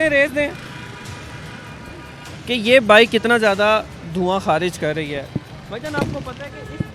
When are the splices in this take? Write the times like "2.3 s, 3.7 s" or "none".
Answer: none